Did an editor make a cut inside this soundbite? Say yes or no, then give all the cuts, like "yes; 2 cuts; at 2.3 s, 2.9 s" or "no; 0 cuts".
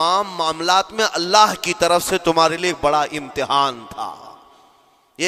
no; 0 cuts